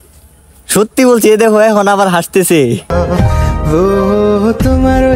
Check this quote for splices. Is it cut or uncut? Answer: uncut